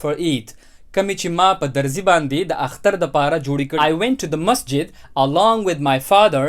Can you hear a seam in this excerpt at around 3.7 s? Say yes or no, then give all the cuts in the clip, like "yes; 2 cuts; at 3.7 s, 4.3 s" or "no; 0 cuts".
yes; 1 cut; at 3.7 s